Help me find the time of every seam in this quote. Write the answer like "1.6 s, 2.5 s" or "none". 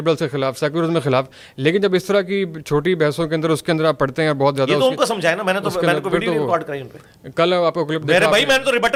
none